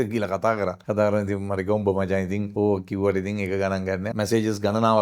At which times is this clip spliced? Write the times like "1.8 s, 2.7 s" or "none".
0.8 s, 2.5 s, 4.1 s